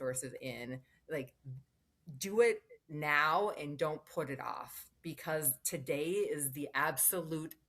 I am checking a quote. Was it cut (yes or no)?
no